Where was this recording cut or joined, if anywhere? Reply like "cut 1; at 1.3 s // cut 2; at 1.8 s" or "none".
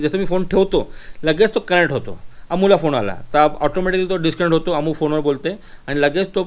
none